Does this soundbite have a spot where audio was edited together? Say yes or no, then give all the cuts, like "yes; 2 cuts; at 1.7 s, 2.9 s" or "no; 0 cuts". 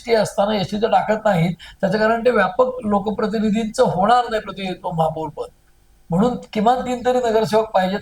no; 0 cuts